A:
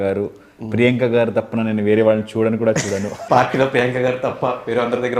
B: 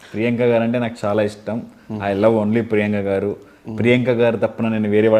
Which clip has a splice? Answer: A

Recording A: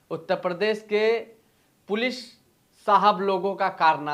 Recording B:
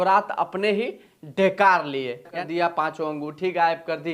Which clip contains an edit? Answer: B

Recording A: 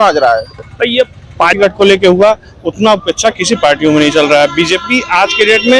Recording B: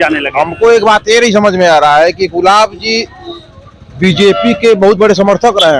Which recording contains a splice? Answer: A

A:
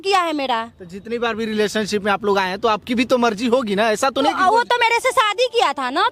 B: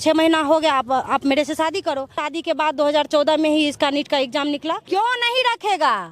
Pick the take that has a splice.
B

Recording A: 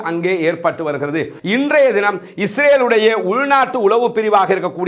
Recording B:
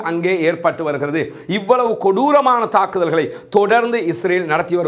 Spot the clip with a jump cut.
A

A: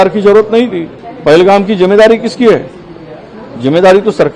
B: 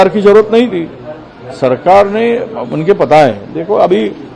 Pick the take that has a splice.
A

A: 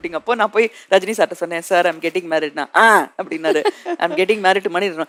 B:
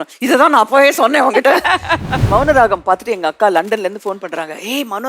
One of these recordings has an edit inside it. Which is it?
B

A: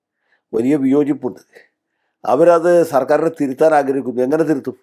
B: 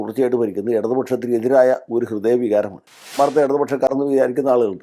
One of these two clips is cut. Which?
B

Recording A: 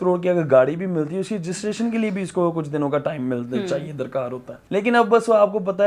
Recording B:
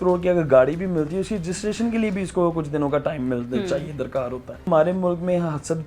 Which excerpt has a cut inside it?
B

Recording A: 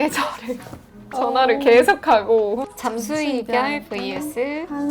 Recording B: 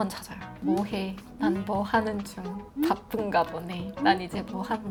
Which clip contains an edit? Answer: A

